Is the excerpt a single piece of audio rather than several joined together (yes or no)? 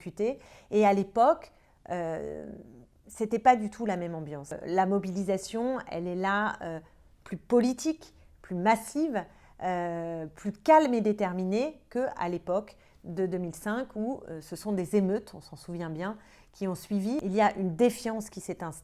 no